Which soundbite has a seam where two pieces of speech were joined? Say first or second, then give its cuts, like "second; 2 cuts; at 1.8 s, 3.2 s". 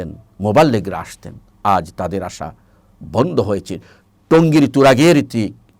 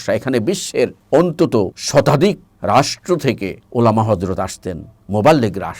second; 4 cuts; at 1.0 s, 1.8 s, 2.5 s, 3.6 s